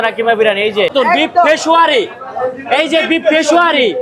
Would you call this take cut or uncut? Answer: cut